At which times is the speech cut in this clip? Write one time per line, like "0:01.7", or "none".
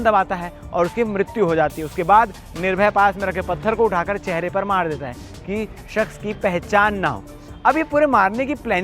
none